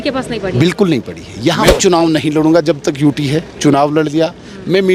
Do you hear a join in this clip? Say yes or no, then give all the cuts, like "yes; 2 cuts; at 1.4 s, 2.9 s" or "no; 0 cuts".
yes; 1 cut; at 1.6 s